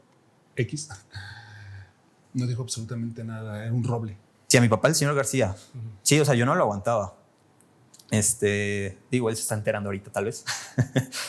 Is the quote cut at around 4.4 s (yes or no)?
yes